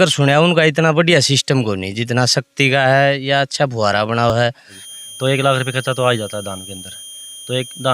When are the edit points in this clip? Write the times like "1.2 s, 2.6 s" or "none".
1.5 s, 4.4 s

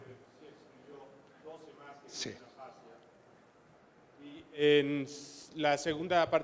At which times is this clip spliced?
none

